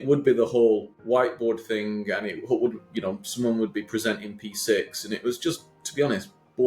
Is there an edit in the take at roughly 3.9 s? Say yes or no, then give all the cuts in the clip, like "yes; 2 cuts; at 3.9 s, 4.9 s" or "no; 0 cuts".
no; 1 cut; at 0.9 s